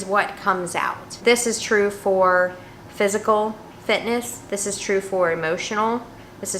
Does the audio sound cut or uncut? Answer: uncut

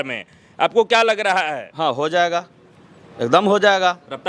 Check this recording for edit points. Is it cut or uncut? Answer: uncut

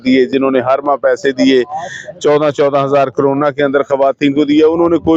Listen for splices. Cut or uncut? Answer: uncut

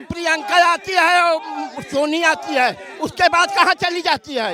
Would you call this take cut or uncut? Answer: uncut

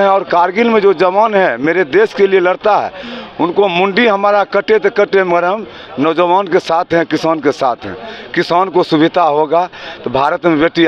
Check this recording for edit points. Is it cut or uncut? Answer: uncut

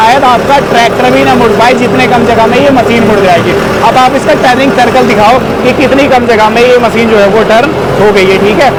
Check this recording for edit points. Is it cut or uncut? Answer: uncut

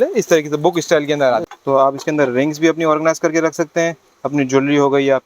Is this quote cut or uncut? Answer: cut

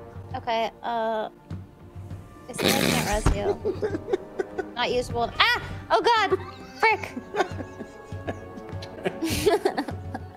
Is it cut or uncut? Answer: uncut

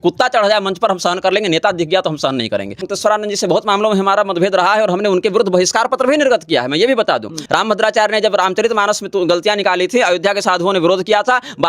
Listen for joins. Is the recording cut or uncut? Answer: cut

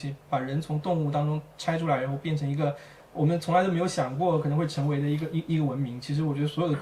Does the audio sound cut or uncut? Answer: uncut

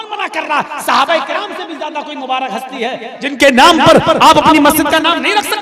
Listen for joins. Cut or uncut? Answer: uncut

